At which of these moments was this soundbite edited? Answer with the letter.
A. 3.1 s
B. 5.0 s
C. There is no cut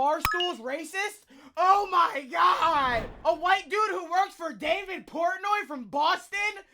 A